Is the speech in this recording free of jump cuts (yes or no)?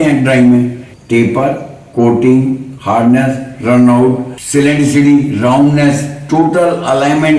no